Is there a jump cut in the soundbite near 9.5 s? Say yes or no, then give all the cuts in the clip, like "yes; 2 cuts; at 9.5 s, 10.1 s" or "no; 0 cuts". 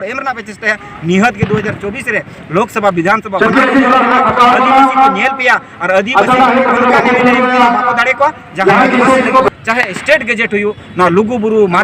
yes; 1 cut; at 9.5 s